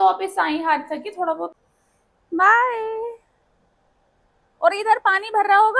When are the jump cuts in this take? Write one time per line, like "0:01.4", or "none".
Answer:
0:01.6